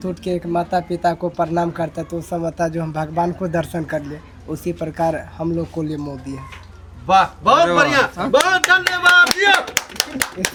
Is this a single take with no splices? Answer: yes; 0 cuts

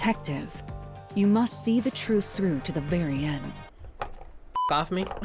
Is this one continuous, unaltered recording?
yes; 0 cuts

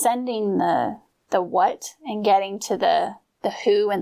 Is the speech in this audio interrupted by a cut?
yes; 1 cut; at 1.1 s

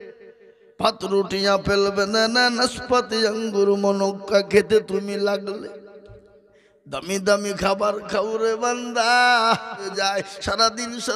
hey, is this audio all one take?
no; 1 cut; at 9.9 s

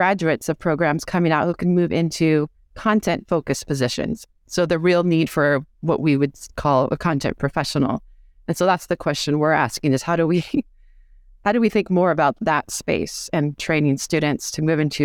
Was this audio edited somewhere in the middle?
no; 0 cuts

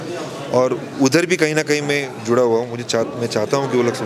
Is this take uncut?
yes; 0 cuts

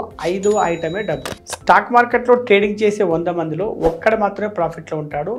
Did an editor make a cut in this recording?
yes; 1 cut; at 1.3 s

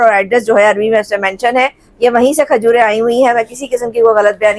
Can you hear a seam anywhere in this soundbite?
no; 0 cuts

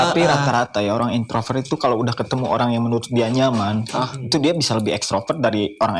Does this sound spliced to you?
no; 0 cuts

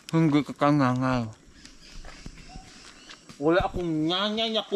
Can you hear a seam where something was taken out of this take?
no; 0 cuts

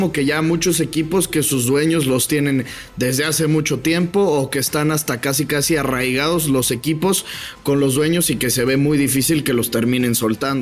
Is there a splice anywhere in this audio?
no; 0 cuts

